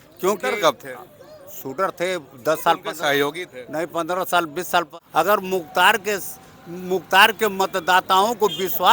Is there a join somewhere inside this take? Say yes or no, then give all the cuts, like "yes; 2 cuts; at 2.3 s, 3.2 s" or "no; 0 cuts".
yes; 1 cut; at 4.9 s